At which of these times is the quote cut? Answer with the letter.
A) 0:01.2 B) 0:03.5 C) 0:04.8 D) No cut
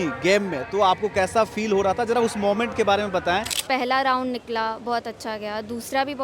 B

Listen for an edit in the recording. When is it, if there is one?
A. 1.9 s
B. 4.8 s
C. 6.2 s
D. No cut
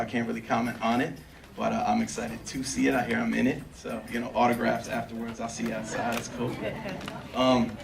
A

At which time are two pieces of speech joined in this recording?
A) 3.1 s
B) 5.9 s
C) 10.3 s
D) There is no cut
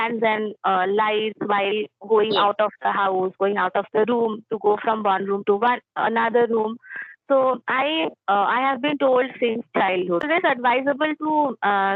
C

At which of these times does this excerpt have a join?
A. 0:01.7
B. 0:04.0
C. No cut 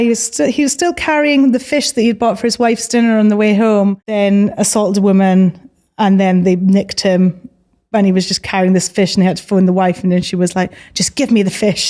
B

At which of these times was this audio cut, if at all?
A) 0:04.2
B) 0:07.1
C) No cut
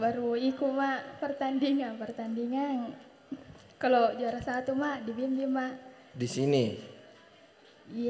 C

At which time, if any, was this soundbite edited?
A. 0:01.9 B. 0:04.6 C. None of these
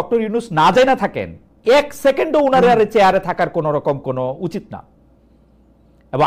C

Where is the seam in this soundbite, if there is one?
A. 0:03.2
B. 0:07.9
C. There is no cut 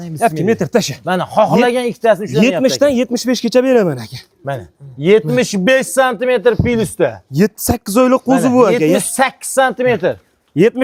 C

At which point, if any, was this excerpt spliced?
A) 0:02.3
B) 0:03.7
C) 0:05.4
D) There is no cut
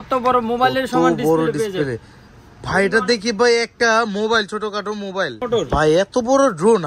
C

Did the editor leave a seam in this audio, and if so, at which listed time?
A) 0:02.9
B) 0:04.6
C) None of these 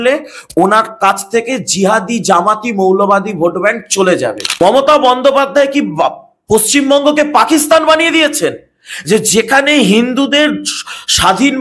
B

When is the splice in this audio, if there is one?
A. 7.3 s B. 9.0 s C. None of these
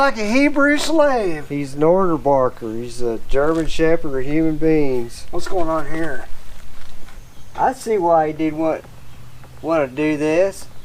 A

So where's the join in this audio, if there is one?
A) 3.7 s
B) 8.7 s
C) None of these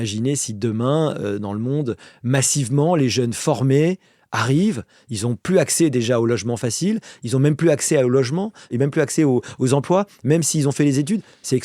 B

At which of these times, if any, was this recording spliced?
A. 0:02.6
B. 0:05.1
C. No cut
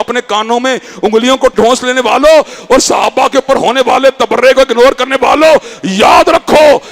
C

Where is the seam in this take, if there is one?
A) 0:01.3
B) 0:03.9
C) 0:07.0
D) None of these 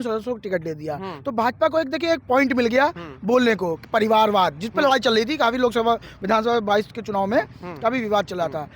D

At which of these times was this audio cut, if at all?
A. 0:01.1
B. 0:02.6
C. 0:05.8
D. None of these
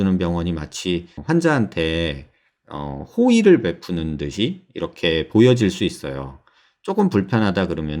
A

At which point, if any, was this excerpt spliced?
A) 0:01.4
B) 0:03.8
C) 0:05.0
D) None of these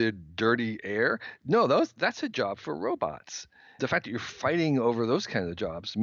B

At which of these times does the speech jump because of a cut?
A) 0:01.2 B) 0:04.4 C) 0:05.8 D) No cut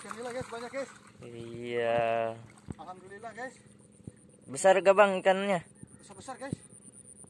D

